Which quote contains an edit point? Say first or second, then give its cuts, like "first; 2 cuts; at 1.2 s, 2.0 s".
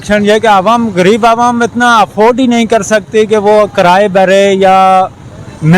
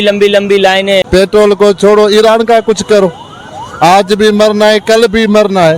second; 1 cut; at 1.0 s